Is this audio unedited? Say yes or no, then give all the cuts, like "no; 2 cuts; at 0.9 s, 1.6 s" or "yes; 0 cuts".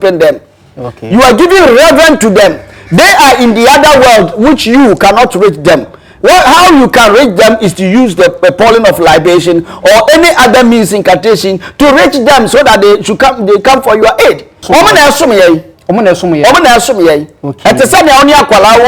no; 1 cut; at 14.6 s